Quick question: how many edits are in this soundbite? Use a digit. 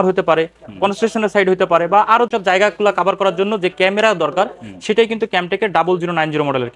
1